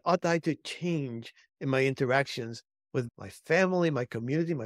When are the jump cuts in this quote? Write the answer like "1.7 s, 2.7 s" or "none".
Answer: 3.1 s